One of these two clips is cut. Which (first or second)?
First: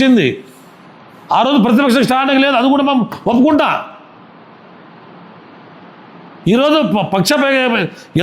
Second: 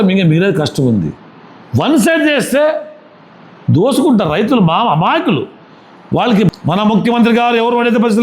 second